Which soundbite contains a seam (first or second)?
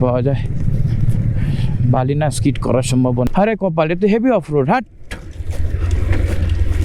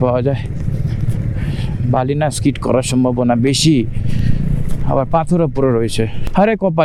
first